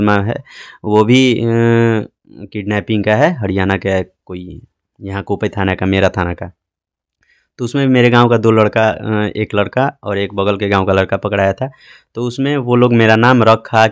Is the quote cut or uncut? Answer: uncut